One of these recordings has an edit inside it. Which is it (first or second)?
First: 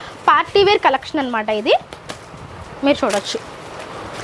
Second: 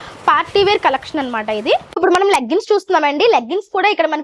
second